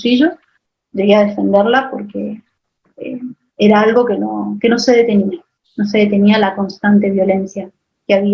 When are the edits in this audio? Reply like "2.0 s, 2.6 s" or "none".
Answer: none